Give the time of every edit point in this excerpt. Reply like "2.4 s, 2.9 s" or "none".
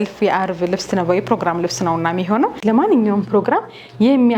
2.6 s